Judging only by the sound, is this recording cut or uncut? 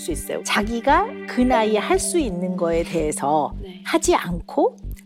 uncut